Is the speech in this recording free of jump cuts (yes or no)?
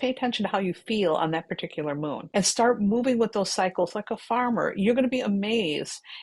no